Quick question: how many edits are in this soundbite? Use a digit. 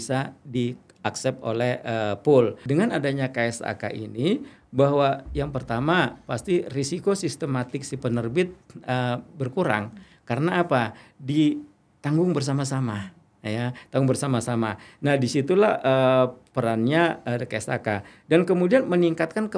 1